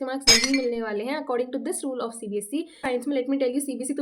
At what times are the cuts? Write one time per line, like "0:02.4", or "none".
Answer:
0:02.8

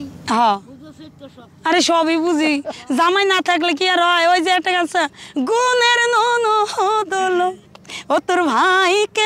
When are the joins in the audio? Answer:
none

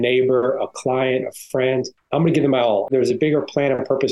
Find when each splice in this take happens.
0:02.0
0:02.9

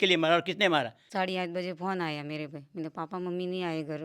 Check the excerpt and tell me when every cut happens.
0:01.0

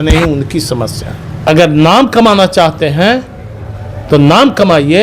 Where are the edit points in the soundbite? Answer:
0:01.5

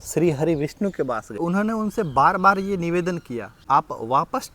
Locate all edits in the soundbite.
0:01.4
0:03.5

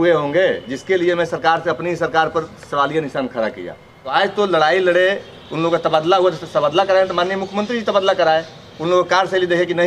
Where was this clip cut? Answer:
0:04.1

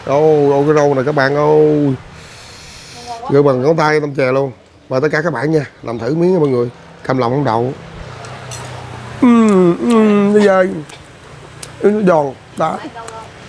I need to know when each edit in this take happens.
none

